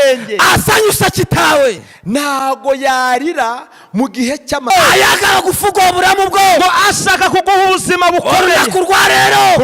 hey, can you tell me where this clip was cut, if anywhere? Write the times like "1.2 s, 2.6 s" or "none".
4.7 s